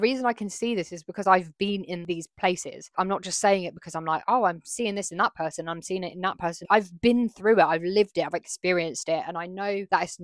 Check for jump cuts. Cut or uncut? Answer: cut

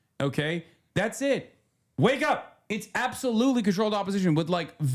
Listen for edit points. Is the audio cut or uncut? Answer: cut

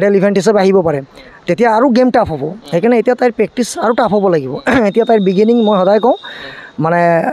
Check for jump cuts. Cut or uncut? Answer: uncut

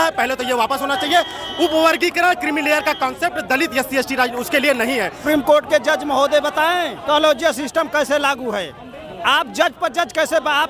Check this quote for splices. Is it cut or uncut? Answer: cut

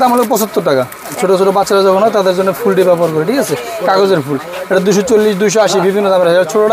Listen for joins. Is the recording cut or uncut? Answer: cut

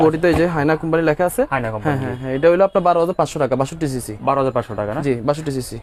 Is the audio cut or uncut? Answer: uncut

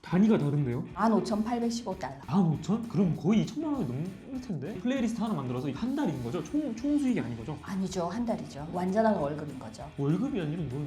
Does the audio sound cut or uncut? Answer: cut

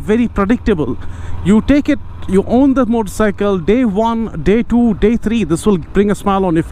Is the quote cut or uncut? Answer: uncut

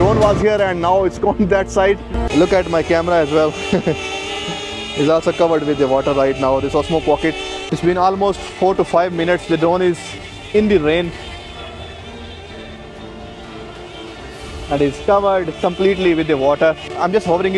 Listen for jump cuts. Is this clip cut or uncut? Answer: cut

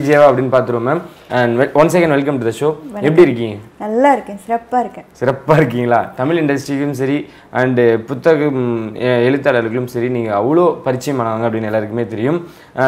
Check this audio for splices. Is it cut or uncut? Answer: uncut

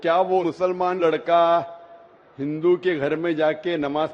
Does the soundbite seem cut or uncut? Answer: uncut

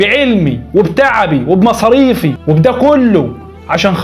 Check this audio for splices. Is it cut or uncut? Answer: cut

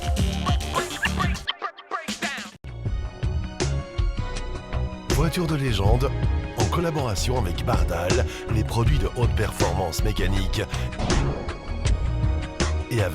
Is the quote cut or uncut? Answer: cut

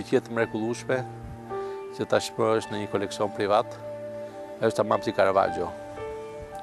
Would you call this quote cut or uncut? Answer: uncut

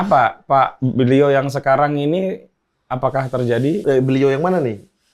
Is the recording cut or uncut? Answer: cut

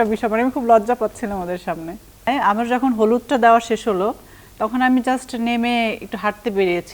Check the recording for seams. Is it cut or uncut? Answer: cut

